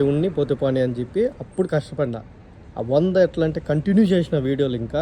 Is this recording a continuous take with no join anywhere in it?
yes; 0 cuts

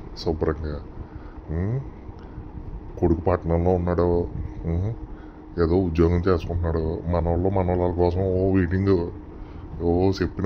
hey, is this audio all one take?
yes; 0 cuts

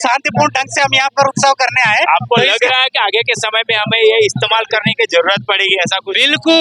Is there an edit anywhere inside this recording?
no; 0 cuts

